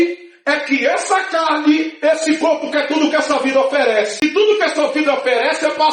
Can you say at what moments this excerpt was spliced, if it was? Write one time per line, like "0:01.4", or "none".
0:04.2